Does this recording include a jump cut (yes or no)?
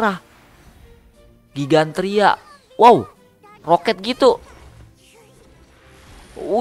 no